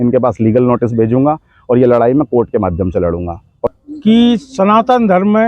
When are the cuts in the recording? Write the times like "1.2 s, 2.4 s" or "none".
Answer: 3.7 s